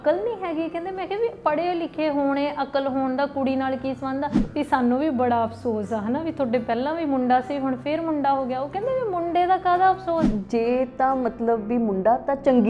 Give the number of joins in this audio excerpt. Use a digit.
2